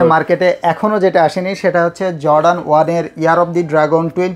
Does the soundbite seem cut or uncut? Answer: uncut